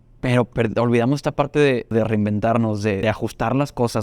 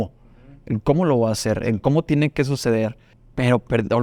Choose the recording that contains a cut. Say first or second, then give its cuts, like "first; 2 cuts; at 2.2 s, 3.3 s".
first; 2 cuts; at 1.9 s, 3.0 s